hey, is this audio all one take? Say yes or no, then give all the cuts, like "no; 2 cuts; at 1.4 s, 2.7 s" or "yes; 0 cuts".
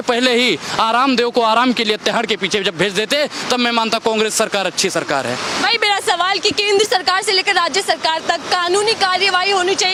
yes; 0 cuts